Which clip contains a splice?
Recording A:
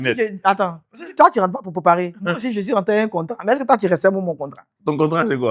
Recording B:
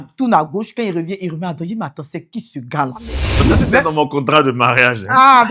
B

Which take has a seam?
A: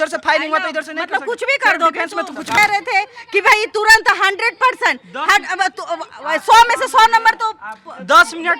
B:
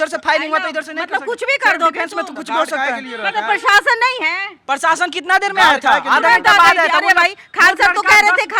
A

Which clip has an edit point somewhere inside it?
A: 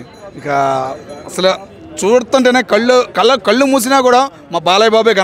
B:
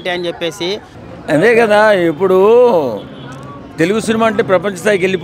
B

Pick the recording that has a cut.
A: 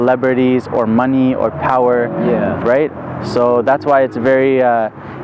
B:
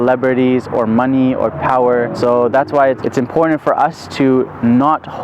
B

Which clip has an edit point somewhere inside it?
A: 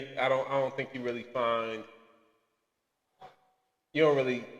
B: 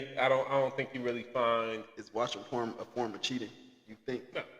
B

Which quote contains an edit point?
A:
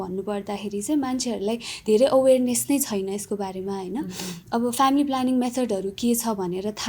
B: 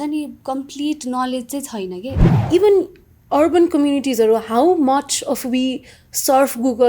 B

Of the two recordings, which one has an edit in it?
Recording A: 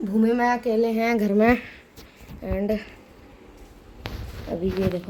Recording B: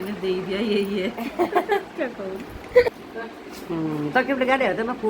B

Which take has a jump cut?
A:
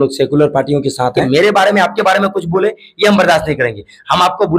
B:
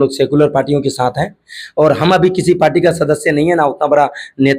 A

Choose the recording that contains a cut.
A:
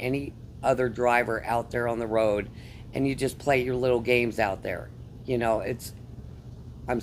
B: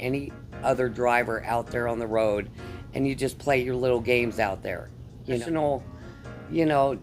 B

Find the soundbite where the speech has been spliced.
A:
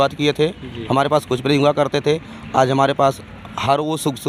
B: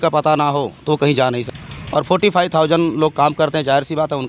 B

